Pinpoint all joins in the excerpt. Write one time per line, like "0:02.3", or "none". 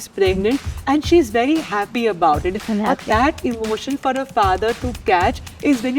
0:02.6